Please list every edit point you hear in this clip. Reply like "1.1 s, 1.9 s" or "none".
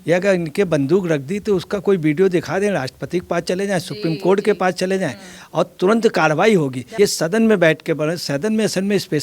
6.8 s